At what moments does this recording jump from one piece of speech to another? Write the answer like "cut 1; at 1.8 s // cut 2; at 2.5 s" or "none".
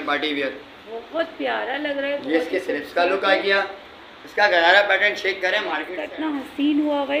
cut 1; at 6.0 s

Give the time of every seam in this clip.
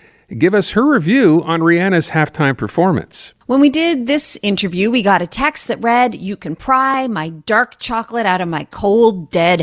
cut 1; at 3.2 s

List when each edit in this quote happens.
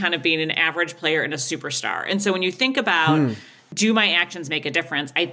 cut 1; at 3.6 s

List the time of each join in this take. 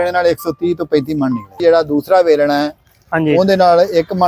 cut 1; at 1.6 s

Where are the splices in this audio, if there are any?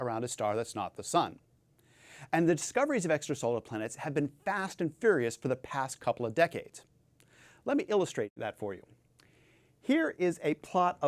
cut 1; at 7.6 s

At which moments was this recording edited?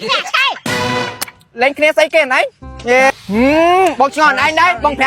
cut 1; at 3.1 s

